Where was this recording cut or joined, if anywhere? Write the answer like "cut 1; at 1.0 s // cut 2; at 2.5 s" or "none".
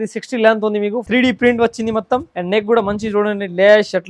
cut 1; at 1.0 s // cut 2; at 2.3 s